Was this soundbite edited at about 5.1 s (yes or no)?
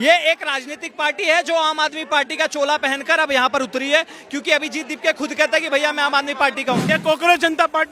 no